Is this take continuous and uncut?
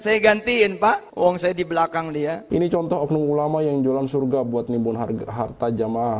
no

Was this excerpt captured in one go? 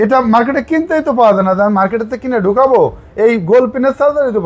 yes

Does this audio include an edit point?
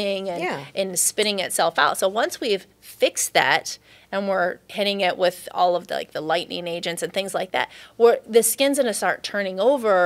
no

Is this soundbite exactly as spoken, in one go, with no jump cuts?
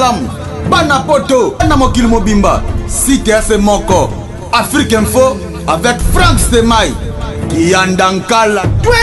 yes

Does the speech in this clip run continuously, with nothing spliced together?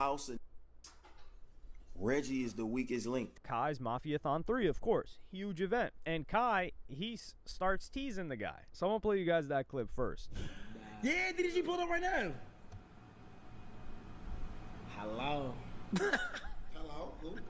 no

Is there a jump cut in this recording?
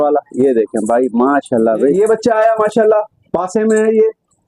yes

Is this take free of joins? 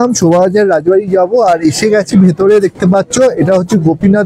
yes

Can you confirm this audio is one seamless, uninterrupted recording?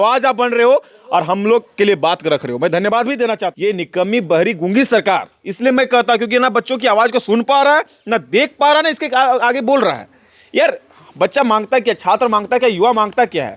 no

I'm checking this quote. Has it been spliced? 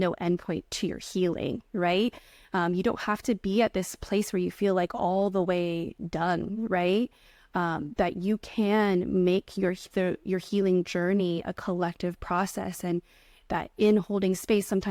no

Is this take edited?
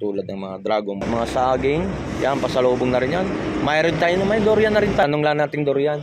yes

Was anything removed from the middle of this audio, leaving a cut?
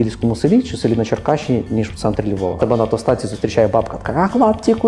yes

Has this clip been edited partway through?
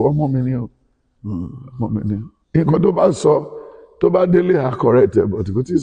no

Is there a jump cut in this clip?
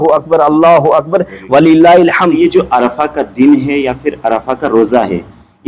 yes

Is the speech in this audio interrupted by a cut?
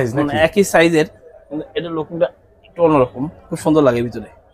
no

